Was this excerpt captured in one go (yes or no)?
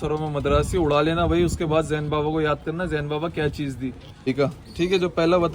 no